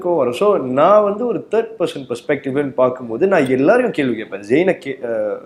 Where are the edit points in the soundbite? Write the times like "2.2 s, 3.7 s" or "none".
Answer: none